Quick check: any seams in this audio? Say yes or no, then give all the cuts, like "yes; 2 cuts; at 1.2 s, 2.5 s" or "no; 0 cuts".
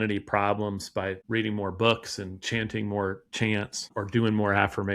yes; 2 cuts; at 1.2 s, 3.9 s